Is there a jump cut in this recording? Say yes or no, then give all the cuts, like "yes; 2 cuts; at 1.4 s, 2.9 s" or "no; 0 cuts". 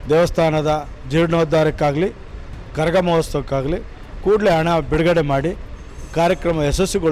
no; 0 cuts